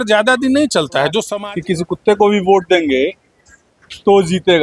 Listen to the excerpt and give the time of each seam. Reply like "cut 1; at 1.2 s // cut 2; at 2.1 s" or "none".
cut 1; at 1.3 s

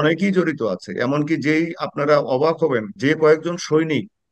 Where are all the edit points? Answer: cut 1; at 2.9 s

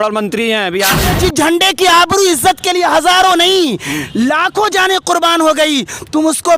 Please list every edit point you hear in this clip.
cut 1; at 1.1 s

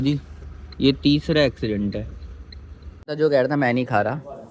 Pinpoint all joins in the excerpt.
cut 1; at 3.0 s

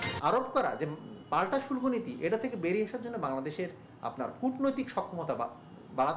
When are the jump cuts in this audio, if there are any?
none

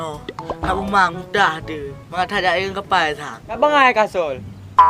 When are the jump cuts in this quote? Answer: cut 1; at 3.6 s

